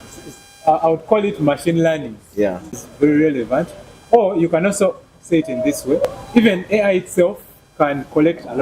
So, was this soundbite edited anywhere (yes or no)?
yes